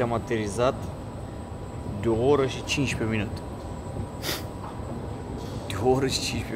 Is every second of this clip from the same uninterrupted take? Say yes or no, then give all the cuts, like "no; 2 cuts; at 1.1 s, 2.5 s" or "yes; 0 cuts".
yes; 0 cuts